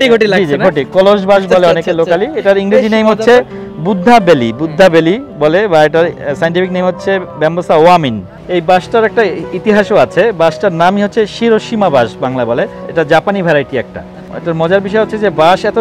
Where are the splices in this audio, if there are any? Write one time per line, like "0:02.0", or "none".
0:08.3
0:12.8
0:14.3